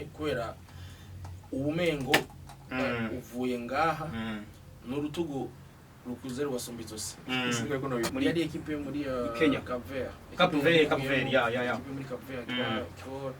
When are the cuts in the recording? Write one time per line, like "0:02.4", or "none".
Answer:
0:08.1